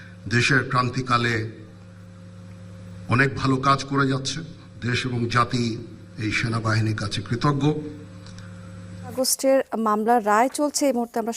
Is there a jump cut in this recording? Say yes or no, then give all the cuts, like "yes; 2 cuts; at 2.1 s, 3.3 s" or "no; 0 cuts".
yes; 1 cut; at 9.1 s